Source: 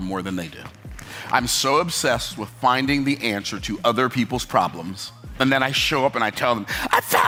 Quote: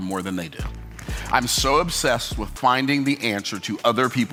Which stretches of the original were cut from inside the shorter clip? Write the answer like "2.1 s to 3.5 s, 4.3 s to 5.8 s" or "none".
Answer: none